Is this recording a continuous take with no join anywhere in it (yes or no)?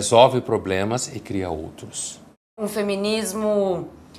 no